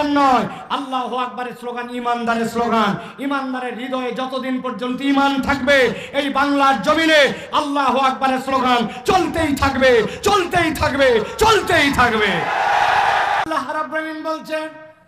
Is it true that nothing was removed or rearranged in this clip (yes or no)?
no